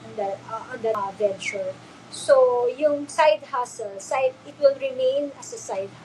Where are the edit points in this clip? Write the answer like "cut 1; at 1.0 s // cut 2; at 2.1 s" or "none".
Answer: cut 1; at 1.0 s

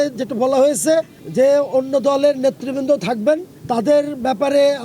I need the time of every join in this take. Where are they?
cut 1; at 1.2 s // cut 2; at 3.5 s

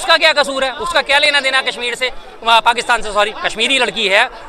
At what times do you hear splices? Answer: none

